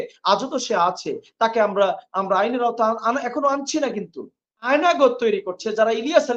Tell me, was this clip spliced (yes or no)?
yes